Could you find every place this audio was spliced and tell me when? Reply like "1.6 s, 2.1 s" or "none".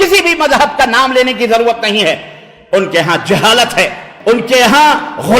4.1 s